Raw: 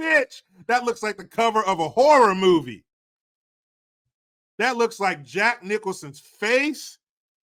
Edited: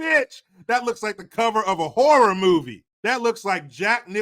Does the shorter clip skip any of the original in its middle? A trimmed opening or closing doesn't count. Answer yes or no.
yes